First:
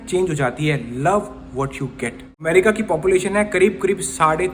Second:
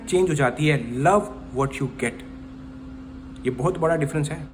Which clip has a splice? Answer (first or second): first